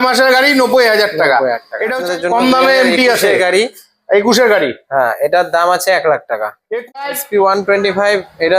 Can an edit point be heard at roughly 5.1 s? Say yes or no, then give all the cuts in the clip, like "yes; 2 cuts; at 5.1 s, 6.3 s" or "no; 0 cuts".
no; 2 cuts; at 2.0 s, 7.0 s